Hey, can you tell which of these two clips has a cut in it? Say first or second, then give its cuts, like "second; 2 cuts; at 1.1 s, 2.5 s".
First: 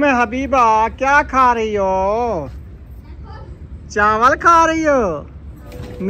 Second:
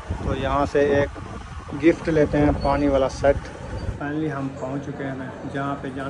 second; 1 cut; at 4.0 s